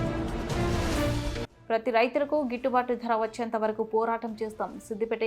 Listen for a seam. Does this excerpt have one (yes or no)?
yes